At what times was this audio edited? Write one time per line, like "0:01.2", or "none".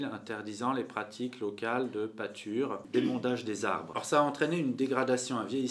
0:02.8
0:04.0